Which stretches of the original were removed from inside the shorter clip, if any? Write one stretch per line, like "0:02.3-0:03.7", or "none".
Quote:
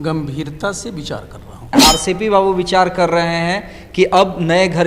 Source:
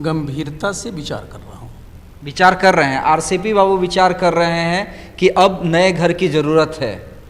0:01.7-0:03.0